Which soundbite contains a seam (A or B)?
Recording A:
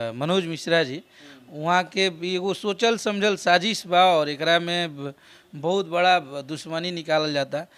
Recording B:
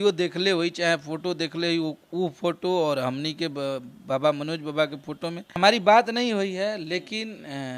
B